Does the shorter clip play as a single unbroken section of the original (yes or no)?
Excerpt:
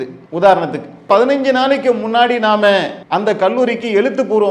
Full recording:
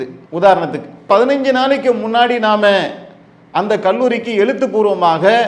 no